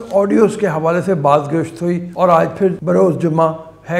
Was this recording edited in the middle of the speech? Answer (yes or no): yes